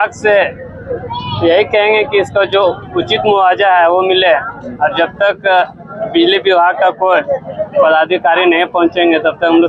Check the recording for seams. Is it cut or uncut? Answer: uncut